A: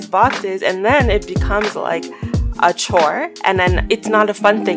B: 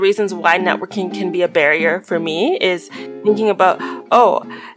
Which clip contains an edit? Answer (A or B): A